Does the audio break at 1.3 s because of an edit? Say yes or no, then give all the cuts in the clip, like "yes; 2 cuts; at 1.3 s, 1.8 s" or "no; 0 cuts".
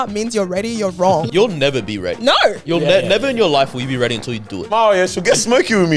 yes; 2 cuts; at 1.3 s, 4.7 s